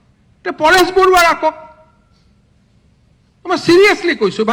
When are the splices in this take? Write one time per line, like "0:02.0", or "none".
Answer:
none